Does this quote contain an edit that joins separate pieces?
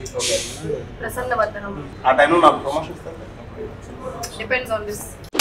yes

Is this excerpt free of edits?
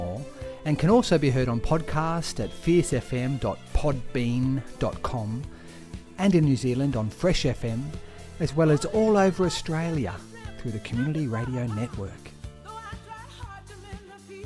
no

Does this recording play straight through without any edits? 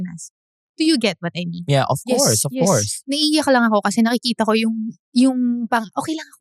yes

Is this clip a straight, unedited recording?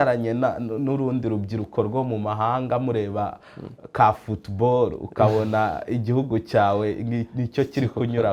yes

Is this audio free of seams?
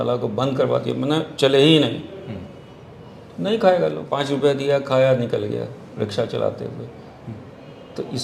no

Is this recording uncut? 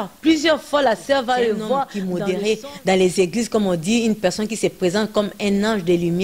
no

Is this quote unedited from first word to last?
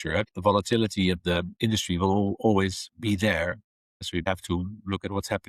no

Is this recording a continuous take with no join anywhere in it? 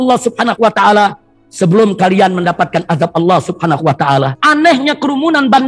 no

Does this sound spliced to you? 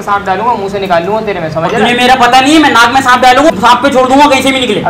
yes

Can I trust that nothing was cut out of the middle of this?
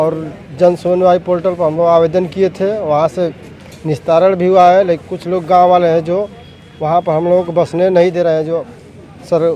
yes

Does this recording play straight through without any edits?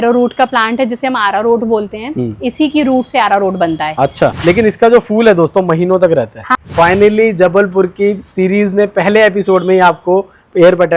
no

